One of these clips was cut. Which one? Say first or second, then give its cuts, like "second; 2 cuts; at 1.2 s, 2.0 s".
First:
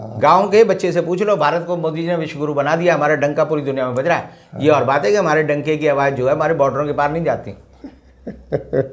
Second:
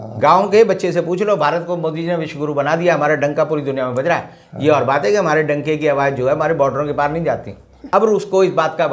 second; 1 cut; at 7.8 s